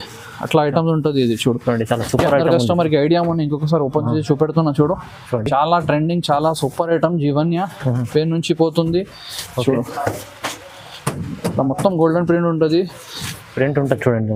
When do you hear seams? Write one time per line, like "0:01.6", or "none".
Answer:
none